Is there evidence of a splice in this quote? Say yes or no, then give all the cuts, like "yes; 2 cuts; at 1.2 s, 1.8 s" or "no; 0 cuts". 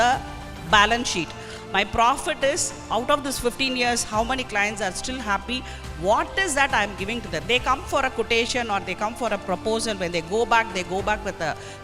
no; 0 cuts